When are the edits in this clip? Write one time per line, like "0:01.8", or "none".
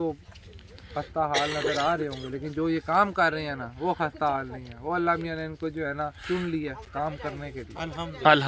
none